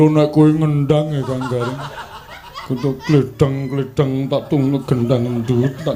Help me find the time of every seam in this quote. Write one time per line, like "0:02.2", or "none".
none